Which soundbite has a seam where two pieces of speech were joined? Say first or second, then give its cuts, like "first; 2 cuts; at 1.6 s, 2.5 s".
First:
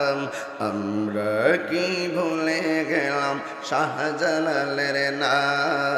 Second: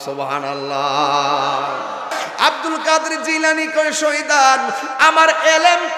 second; 1 cut; at 2.3 s